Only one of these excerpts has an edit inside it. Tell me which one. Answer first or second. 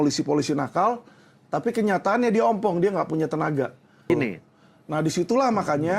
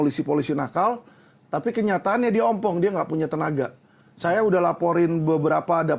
first